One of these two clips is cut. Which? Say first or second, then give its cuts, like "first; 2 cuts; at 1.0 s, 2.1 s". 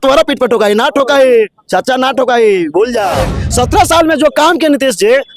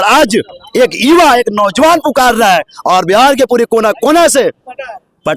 first; 1 cut; at 3.4 s